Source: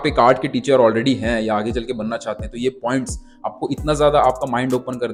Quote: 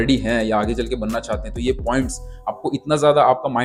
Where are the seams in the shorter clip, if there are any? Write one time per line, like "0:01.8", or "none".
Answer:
none